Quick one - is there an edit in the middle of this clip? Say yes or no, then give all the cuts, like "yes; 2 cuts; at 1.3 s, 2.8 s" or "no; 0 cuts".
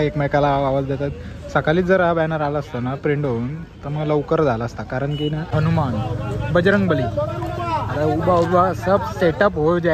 yes; 1 cut; at 5.5 s